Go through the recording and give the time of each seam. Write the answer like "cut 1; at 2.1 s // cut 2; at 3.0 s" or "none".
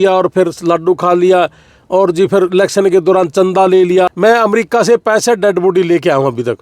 cut 1; at 4.1 s